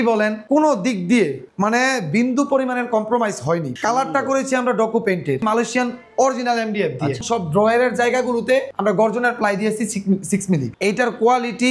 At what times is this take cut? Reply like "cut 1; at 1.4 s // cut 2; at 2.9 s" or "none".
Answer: cut 1; at 5.4 s // cut 2; at 7.2 s // cut 3; at 10.7 s